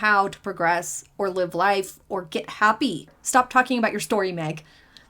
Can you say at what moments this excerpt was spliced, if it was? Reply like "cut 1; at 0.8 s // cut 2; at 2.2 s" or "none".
cut 1; at 3.2 s